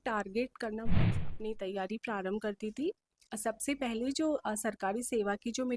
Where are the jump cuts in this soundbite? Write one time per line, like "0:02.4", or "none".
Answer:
0:01.2